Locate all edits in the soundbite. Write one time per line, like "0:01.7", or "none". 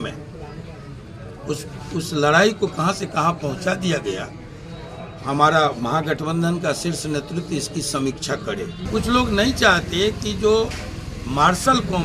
0:08.8